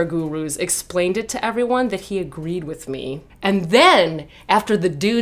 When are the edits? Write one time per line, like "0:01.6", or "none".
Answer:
0:03.3